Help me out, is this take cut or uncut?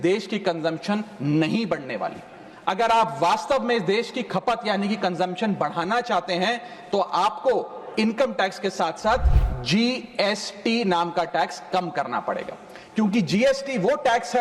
uncut